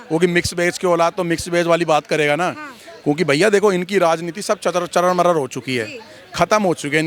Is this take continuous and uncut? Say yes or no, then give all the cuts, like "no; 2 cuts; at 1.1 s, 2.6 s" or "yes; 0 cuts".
yes; 0 cuts